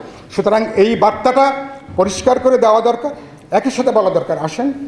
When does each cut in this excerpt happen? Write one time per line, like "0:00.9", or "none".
none